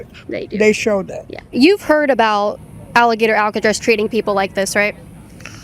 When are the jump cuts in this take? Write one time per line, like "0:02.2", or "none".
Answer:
0:01.5